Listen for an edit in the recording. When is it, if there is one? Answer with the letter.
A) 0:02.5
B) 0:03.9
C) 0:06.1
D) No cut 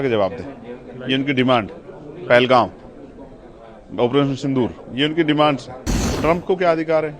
C